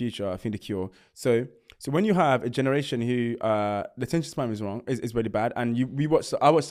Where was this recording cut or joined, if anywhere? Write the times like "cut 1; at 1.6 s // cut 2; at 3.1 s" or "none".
none